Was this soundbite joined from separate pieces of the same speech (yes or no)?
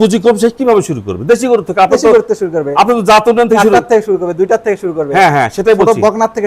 no